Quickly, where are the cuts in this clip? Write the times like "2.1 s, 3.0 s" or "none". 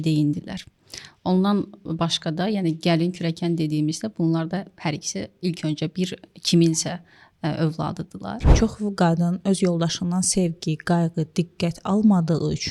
8.5 s